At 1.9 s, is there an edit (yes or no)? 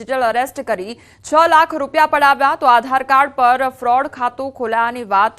yes